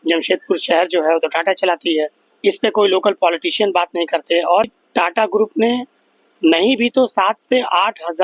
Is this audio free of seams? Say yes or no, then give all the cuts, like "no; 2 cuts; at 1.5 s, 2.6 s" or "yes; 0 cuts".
no; 2 cuts; at 2.2 s, 4.8 s